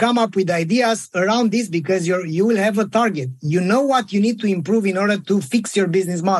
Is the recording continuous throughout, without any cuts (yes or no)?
yes